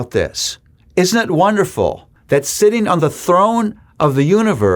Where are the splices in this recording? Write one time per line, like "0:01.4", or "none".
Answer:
0:02.1